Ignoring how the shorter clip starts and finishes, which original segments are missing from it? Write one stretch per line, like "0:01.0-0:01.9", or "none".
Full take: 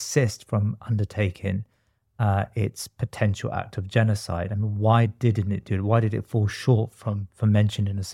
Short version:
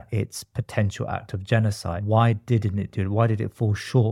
0:04.4-0:04.7